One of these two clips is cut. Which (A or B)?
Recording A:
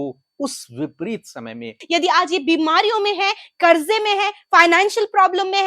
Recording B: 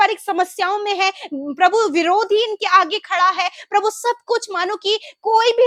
A